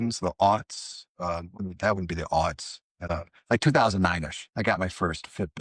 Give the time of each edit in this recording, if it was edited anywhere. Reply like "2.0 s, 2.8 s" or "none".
1.7 s, 3.0 s, 4.4 s